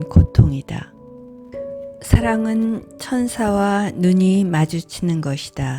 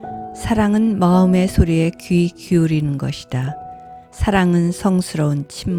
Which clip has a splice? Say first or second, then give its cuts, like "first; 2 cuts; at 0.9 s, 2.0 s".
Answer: first; 1 cut; at 1.5 s